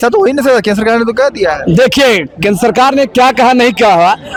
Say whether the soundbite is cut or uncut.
uncut